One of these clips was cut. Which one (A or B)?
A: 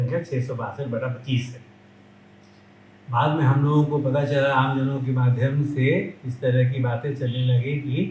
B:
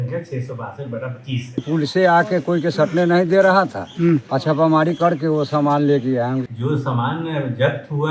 B